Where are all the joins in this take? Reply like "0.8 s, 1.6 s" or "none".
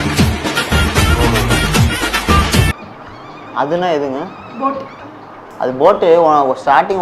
2.9 s